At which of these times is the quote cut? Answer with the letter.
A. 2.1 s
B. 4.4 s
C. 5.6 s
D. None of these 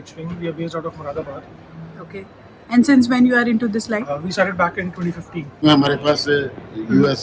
C